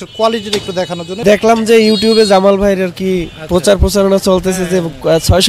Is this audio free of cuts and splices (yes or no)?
no